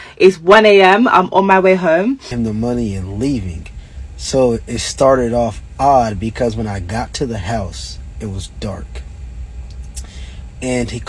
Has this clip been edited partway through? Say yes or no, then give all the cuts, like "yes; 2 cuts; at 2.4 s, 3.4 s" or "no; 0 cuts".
yes; 1 cut; at 2.3 s